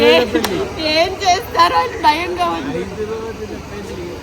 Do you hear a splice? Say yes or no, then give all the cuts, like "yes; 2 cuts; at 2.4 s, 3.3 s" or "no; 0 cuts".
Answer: no; 0 cuts